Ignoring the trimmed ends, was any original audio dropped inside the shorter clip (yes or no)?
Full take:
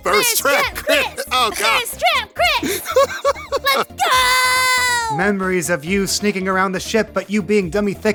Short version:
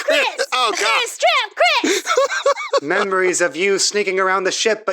yes